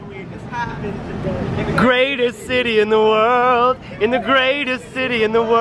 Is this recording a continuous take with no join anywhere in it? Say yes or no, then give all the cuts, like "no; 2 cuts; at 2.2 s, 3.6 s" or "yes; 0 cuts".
yes; 0 cuts